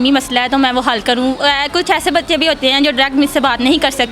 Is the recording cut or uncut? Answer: uncut